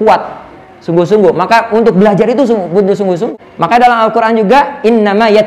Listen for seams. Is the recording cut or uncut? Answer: cut